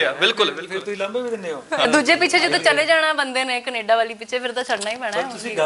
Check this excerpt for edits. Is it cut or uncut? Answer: cut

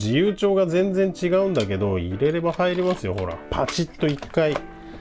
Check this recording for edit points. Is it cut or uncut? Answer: cut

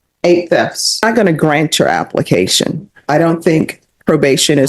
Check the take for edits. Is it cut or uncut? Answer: cut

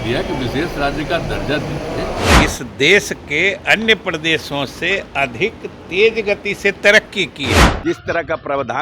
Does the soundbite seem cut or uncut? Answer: cut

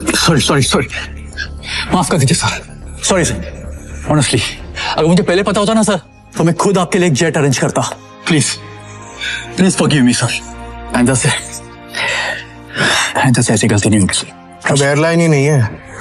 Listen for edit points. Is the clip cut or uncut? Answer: uncut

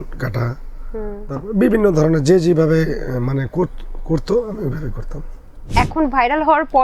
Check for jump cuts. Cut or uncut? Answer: cut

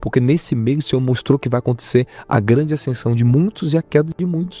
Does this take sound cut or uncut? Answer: uncut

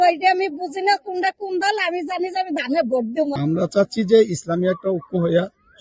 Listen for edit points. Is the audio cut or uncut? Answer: cut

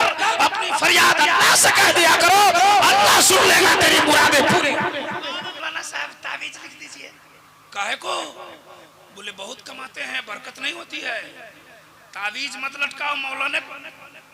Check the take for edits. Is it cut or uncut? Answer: cut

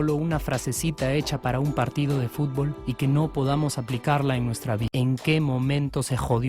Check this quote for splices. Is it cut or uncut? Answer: cut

